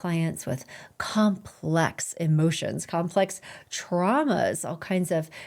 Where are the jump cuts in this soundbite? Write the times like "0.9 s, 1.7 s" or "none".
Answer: none